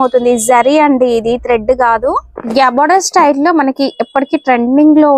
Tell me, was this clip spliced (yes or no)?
yes